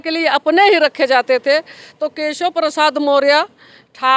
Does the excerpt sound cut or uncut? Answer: uncut